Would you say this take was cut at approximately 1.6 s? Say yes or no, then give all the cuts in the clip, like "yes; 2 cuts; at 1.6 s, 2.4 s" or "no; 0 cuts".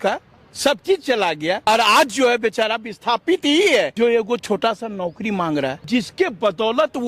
yes; 3 cuts; at 1.6 s, 3.9 s, 5.8 s